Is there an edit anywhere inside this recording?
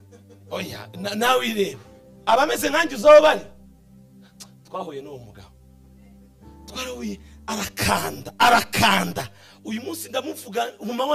no; 0 cuts

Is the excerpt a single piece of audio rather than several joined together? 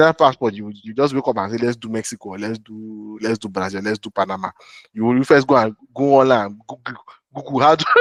yes; 0 cuts

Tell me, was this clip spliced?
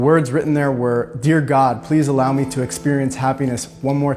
no; 0 cuts

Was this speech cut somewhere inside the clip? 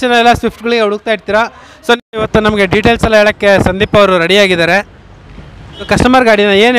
yes; 2 cuts; at 2.0 s, 5.9 s

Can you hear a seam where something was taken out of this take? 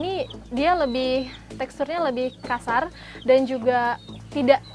no; 0 cuts

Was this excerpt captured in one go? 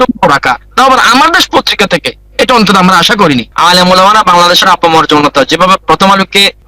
no; 1 cut; at 3.5 s

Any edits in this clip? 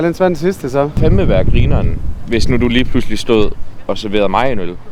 no; 0 cuts

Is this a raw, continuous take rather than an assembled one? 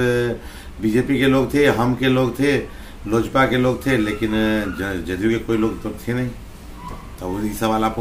yes; 0 cuts

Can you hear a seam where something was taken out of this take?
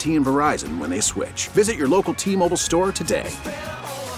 no; 0 cuts

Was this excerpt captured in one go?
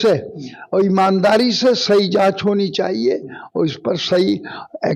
yes; 0 cuts

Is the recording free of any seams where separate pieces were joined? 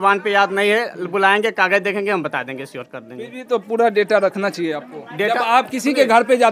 yes; 0 cuts

